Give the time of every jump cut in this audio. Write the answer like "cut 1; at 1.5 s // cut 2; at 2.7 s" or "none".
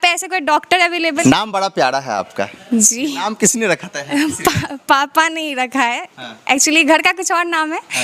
cut 1; at 1.2 s